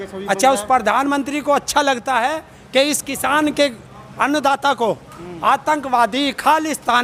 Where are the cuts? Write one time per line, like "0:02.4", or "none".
none